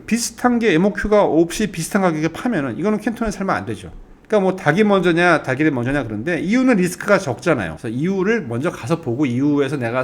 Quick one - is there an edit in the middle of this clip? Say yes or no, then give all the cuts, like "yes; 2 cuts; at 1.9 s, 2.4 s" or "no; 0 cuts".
yes; 1 cut; at 7.7 s